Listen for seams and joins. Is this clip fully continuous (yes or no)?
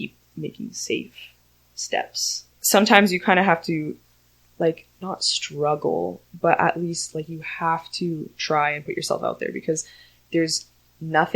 no